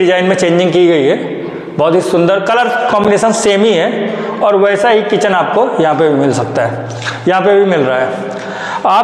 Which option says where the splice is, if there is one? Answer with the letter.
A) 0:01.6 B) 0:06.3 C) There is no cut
C